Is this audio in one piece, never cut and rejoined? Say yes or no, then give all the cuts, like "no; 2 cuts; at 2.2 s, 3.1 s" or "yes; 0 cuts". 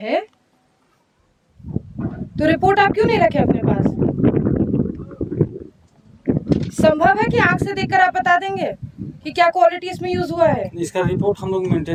yes; 0 cuts